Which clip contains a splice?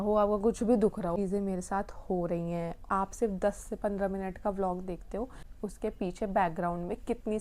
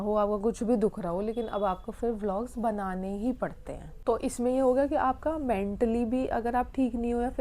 first; 3 cuts; at 1.2 s, 2.8 s, 5.6 s

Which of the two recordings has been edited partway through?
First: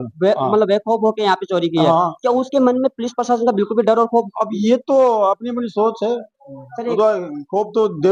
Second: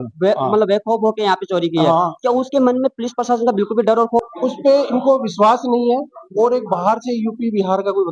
second; 1 cut; at 4.3 s

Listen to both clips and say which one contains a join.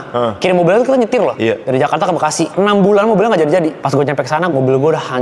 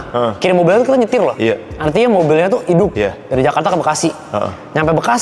first; 3 cuts; at 1.6 s, 2.5 s, 4.5 s

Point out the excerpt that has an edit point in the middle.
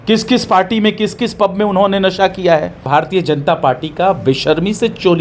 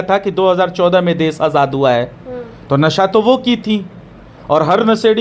first; 1 cut; at 2.8 s

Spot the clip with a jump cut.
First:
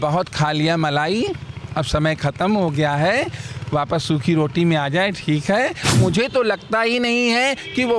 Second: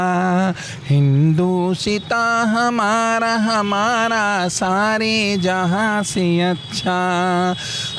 first; 1 cut; at 6.0 s

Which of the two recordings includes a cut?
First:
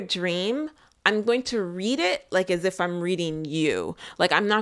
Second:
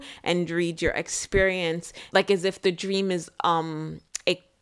second; 1 cut; at 1.9 s

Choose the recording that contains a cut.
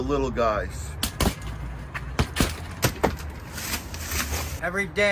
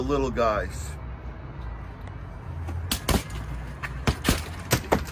first; 1 cut; at 0.9 s

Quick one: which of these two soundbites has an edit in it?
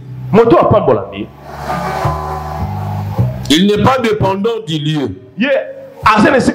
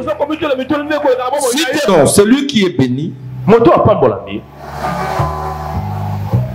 second; 1 cut; at 1.9 s

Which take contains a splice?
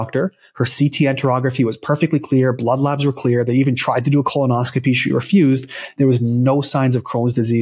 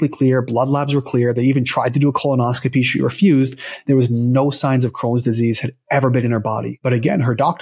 second; 1 cut; at 6.7 s

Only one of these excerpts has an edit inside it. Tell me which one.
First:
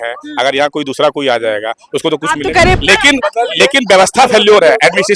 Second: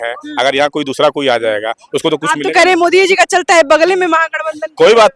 first; 1 cut; at 2.8 s

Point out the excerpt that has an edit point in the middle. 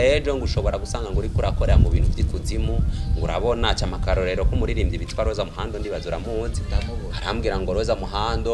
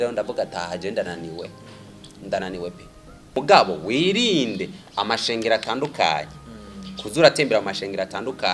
second; 1 cut; at 3.3 s

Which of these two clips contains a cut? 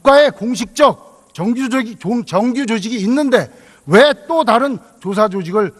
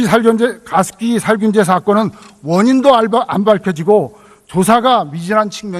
second; 1 cut; at 3.0 s

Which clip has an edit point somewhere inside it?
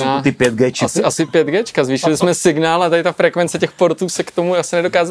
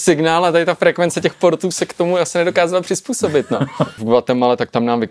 second; 1 cut; at 4.0 s

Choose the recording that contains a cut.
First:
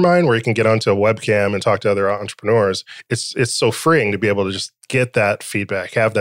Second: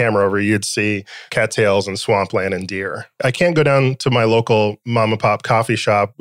second; 2 cuts; at 1.1 s, 3.1 s

